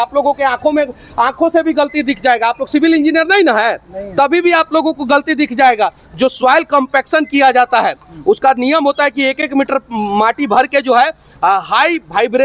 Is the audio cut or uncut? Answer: uncut